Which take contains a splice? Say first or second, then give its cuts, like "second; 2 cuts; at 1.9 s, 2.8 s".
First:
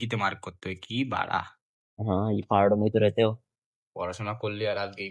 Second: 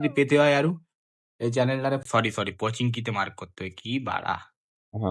second; 1 cut; at 2.0 s